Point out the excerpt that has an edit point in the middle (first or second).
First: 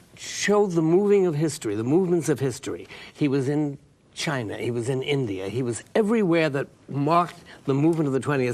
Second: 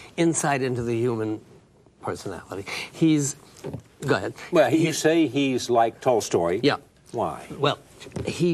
first